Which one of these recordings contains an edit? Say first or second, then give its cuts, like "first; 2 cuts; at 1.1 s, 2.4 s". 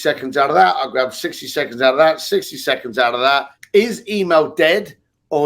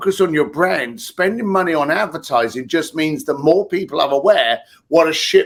first; 1 cut; at 3.6 s